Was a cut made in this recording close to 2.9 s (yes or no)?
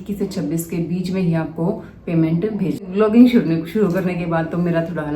yes